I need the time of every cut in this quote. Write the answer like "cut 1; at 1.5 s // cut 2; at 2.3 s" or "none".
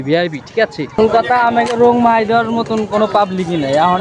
cut 1; at 1.0 s